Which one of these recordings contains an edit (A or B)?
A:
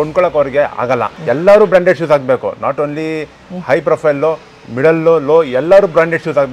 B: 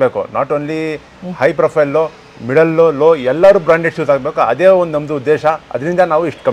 A